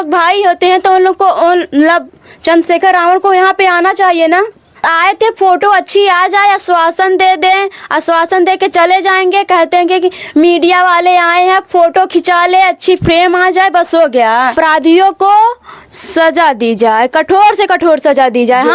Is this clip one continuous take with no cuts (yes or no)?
no